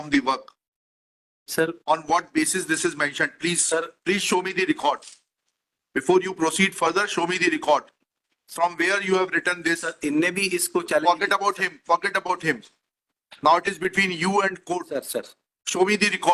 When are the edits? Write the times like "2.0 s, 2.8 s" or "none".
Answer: none